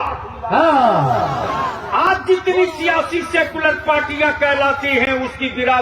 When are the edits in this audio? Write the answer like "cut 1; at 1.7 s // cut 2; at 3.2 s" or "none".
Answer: cut 1; at 1.8 s